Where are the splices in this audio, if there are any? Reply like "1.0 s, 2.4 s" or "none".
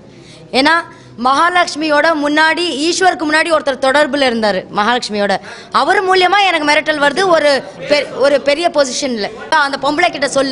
9.5 s